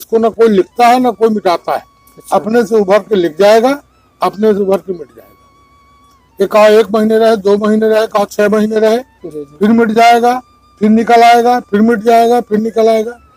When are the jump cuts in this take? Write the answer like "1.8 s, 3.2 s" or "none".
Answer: none